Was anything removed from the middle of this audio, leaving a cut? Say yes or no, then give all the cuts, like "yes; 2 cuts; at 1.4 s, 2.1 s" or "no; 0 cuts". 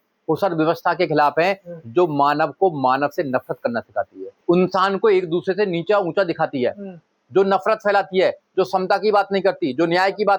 yes; 1 cut; at 4.4 s